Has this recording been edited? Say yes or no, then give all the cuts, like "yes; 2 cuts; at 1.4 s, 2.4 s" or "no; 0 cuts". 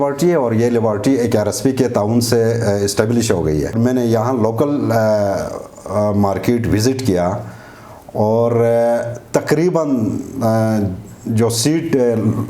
yes; 1 cut; at 3.8 s